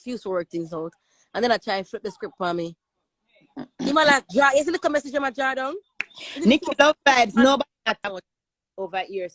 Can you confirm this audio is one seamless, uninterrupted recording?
no; 1 cut; at 8.0 s

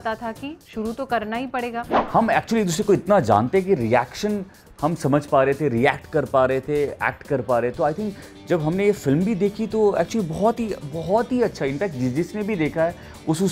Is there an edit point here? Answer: yes; 1 cut; at 2.0 s

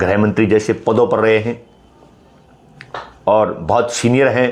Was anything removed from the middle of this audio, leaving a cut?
no; 0 cuts

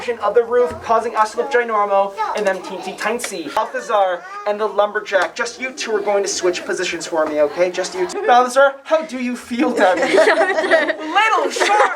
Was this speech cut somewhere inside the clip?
yes; 2 cuts; at 3.6 s, 8.1 s

